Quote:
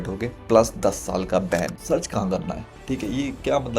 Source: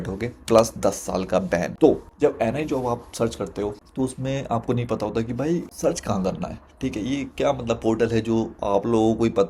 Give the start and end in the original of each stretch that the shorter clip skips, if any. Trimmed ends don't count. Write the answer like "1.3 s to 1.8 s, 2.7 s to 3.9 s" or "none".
1.7 s to 5.7 s